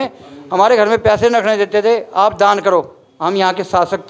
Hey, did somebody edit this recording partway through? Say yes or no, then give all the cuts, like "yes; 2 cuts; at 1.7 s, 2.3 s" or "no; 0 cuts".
yes; 1 cut; at 3.0 s